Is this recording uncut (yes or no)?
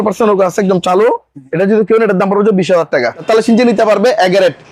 no